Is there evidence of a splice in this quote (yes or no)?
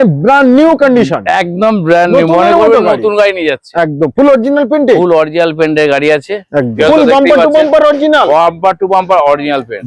yes